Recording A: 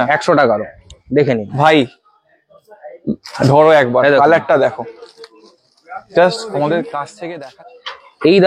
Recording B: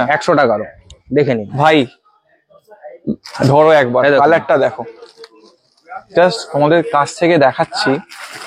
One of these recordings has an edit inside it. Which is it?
A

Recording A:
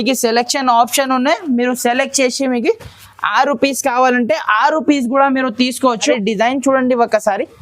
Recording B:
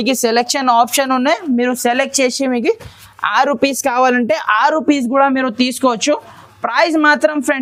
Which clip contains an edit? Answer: A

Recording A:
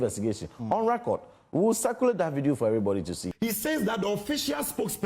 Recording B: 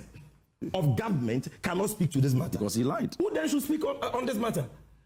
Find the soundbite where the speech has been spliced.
A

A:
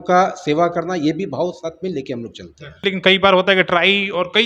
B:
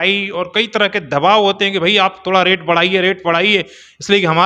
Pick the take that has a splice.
A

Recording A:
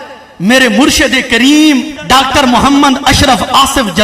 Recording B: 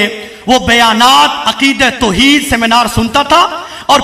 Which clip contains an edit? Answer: A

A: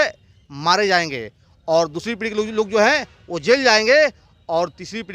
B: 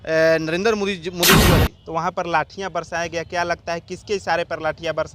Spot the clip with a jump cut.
B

